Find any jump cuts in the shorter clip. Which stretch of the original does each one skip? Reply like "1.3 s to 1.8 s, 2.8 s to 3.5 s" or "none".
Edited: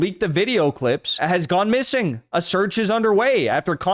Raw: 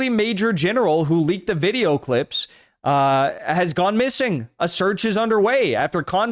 2.4 s to 3.4 s